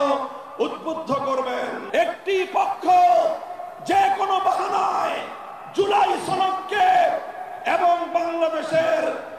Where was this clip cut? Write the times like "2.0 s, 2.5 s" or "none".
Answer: 1.8 s